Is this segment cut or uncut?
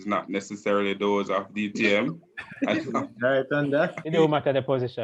cut